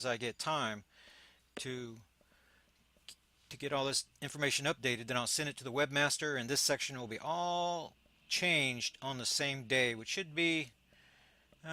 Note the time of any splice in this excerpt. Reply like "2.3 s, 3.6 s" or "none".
none